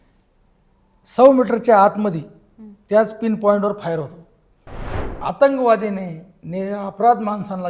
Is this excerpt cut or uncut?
cut